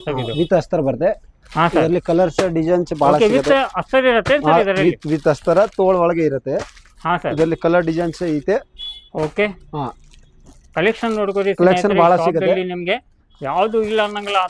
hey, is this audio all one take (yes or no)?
yes